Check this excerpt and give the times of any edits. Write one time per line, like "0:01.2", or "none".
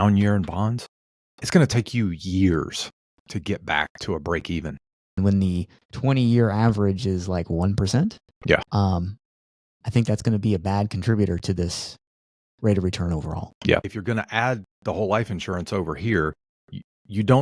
0:05.2
0:13.9